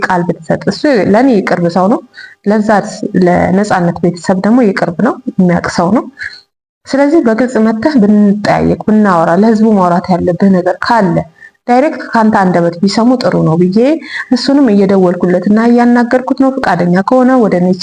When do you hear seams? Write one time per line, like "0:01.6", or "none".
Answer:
none